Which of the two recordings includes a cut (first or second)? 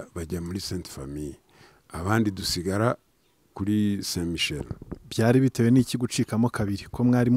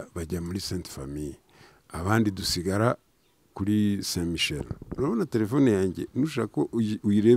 second